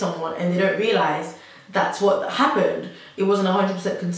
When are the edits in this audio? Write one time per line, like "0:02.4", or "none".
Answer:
none